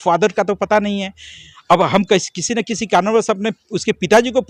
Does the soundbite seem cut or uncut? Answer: uncut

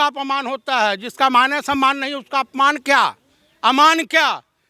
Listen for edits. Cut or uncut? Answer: uncut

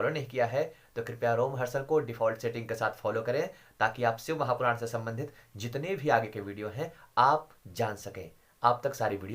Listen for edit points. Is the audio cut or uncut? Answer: uncut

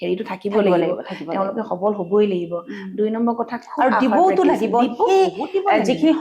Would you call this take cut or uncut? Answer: uncut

